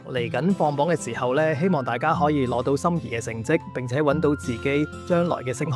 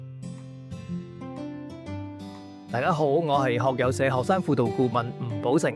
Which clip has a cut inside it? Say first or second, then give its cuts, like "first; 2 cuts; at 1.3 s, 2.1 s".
second; 1 cut; at 2.7 s